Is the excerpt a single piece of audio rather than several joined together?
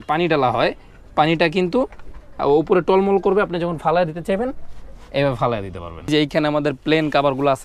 no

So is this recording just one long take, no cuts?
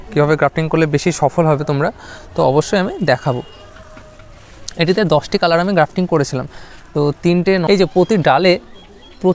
no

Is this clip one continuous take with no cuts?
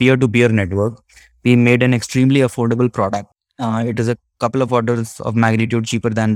no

